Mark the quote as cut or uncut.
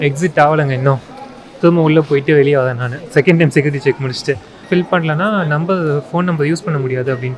cut